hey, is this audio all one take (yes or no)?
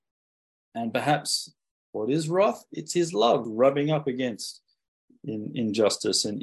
no